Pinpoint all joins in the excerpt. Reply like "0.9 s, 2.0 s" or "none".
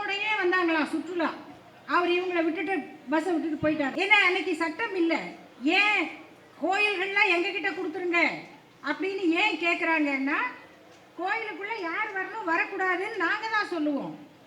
3.9 s